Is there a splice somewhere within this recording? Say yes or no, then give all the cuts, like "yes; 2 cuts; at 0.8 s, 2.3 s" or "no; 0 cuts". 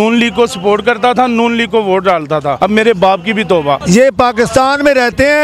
yes; 2 cuts; at 2.6 s, 3.8 s